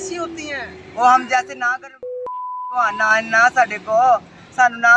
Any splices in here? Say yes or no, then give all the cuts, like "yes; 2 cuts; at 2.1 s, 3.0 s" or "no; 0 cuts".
no; 0 cuts